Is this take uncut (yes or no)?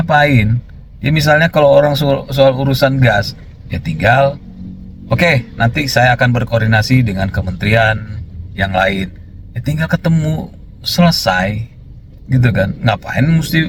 yes